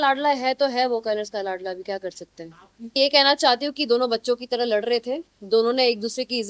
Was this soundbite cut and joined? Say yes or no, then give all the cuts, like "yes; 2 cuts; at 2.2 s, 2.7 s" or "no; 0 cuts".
yes; 1 cut; at 3.0 s